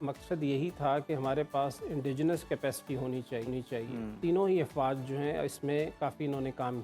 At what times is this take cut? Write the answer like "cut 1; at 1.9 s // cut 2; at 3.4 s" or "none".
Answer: cut 1; at 4.2 s